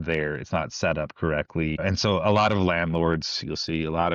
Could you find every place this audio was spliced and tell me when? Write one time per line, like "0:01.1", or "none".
0:01.8